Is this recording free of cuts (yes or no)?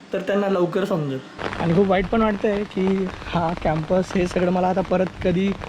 no